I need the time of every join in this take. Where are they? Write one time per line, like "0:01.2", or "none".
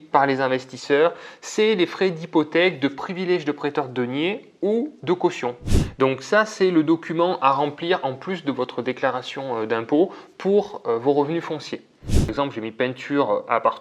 0:05.7
0:12.3